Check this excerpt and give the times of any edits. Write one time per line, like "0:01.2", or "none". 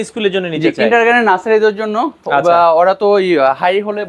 none